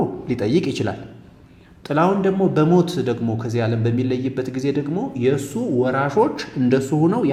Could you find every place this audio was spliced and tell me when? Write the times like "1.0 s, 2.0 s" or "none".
none

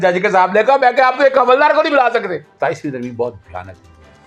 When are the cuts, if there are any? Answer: 2.4 s

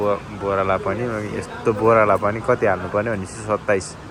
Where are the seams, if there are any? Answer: none

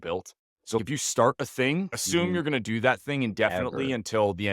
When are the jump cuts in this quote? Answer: 0.8 s, 2.0 s

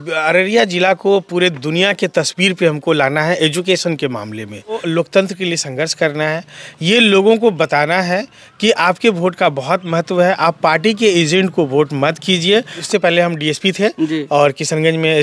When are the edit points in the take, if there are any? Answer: 4.8 s, 12.8 s

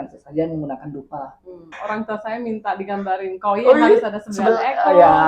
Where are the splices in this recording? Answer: 1.4 s

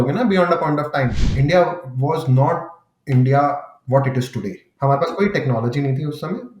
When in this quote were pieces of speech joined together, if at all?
1.3 s, 4.6 s

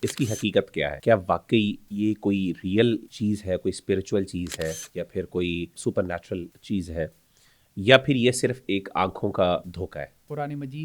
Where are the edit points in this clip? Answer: 1.0 s, 1.8 s, 3.1 s, 4.8 s, 6.2 s, 9.9 s

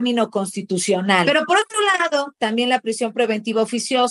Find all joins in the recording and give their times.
1.2 s

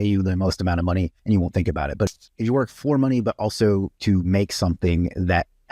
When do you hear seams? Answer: 1.2 s, 2.1 s, 3.9 s

